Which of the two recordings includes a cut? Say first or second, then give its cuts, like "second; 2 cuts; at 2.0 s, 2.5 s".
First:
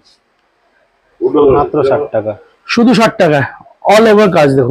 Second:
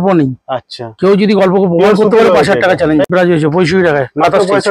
second; 1 cut; at 3.1 s